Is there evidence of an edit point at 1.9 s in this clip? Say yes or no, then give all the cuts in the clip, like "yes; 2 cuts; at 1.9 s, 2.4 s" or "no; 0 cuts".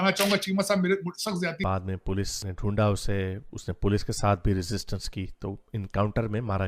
yes; 1 cut; at 1.9 s